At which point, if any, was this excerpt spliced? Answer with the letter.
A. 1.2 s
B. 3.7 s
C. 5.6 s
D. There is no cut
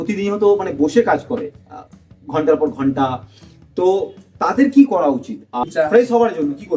C